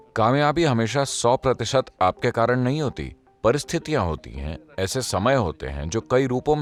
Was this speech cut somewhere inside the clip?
no; 0 cuts

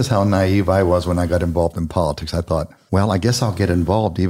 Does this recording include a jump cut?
yes; 1 cut; at 2.8 s

